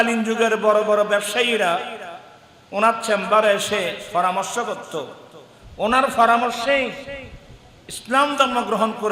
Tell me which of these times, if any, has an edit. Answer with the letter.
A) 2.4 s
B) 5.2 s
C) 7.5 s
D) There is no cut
D